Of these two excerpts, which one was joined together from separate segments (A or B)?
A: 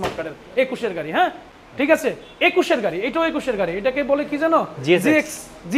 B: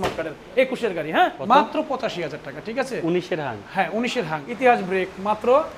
B